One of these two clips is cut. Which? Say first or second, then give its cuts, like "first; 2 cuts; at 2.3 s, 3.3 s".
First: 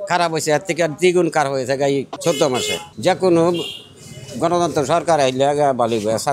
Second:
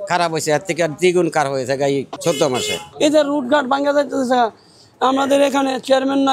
second; 1 cut; at 2.8 s